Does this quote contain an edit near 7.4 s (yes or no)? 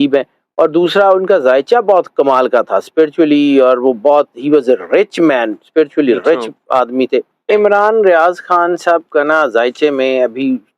yes